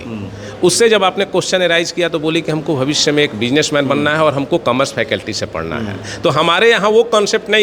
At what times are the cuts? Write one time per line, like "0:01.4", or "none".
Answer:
none